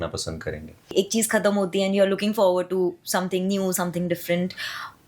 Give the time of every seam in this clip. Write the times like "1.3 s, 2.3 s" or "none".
0.9 s

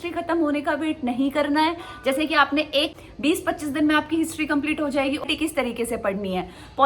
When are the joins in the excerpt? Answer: 3.0 s, 5.2 s

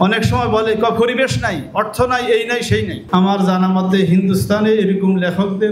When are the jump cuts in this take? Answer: 3.0 s

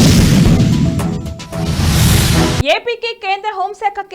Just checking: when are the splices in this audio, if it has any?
2.6 s

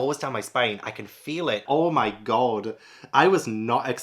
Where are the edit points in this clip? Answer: 1.6 s

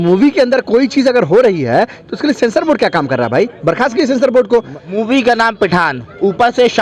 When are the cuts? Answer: 4.8 s

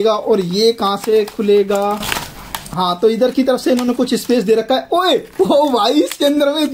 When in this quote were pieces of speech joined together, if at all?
none

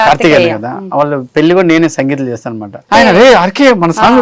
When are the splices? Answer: 2.9 s

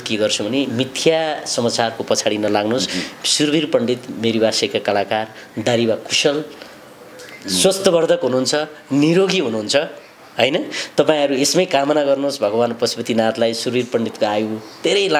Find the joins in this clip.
none

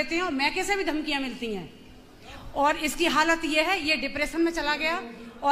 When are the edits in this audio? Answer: none

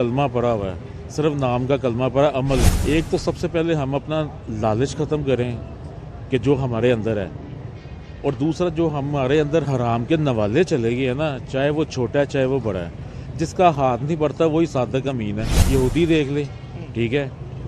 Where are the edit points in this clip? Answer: 2.7 s, 15.5 s

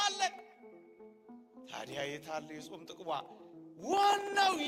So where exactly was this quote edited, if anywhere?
none

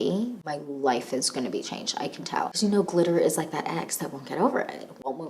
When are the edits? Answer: 2.6 s

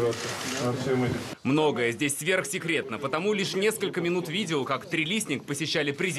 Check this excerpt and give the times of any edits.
5.2 s

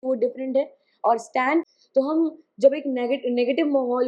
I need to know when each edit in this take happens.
1.7 s

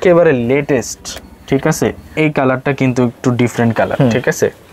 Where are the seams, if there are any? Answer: 2.2 s

